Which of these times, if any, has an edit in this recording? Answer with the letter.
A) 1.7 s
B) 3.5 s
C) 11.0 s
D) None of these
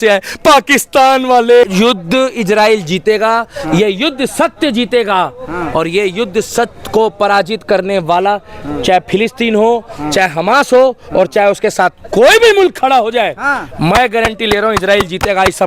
A